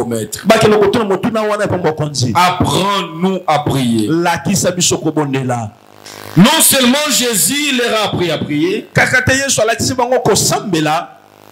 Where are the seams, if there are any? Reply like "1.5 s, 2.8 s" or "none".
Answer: none